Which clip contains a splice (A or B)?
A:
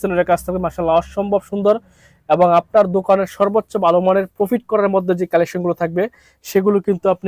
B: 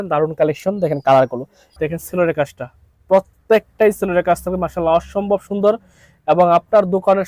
B